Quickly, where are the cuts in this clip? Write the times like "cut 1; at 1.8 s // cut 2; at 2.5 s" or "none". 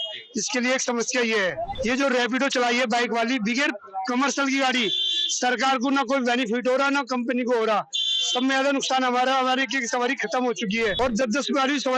cut 1; at 1.7 s // cut 2; at 11.0 s